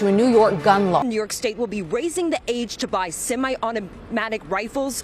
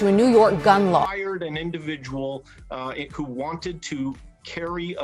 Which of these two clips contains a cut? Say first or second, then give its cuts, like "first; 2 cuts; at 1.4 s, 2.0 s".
first; 1 cut; at 1.0 s